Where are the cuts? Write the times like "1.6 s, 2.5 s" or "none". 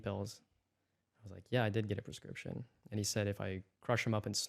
none